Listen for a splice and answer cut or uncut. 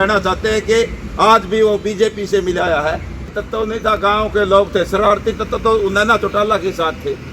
cut